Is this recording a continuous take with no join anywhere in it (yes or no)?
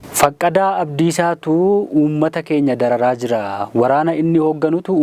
yes